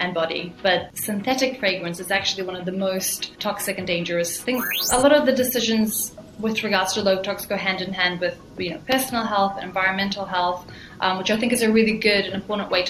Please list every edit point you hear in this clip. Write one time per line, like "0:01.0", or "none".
0:00.9
0:03.3
0:04.8